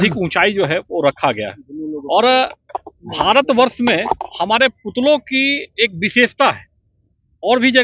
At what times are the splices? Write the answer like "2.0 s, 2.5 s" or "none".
none

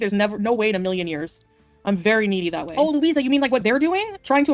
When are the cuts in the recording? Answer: 2.7 s

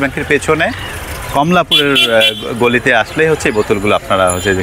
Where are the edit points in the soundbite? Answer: none

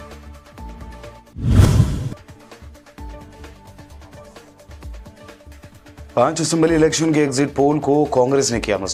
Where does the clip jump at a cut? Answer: none

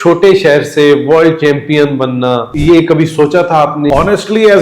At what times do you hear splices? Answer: 2.5 s, 3.9 s

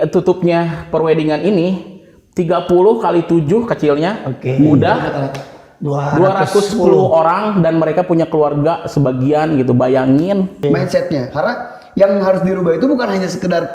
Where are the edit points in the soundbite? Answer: 10.6 s

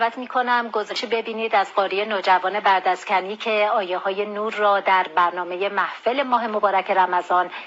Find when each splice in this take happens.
0.9 s

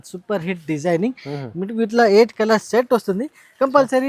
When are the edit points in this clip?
none

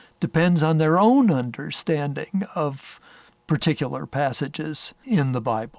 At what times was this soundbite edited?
4.9 s

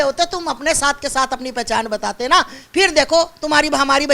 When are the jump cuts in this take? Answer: none

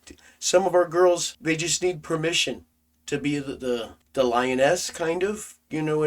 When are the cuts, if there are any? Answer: 1.3 s, 4.0 s

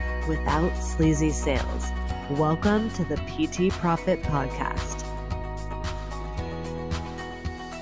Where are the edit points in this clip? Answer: none

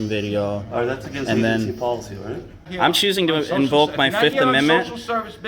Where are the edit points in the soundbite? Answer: 2.6 s

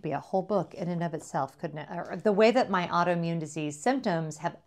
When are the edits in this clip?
2.1 s

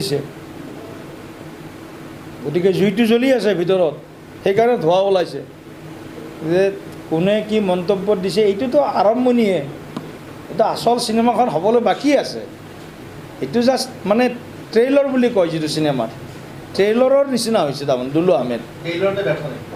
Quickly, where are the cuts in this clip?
none

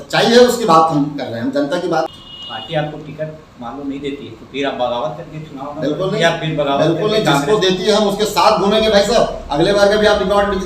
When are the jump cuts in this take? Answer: 2.1 s

